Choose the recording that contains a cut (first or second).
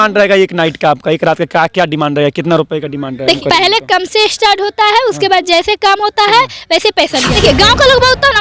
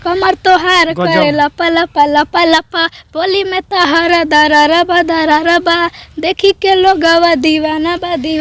first